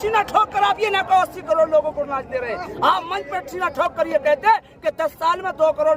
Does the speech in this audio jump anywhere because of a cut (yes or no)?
no